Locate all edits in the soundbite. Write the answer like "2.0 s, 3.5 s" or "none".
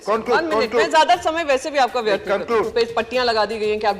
2.7 s